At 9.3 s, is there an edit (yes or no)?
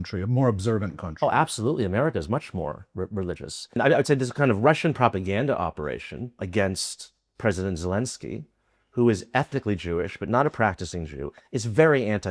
no